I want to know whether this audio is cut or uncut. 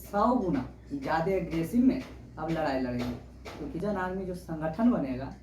cut